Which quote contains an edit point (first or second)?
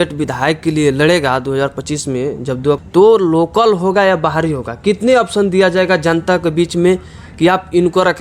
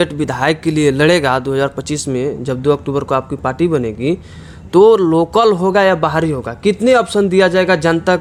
first